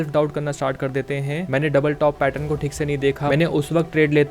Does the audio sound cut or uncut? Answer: cut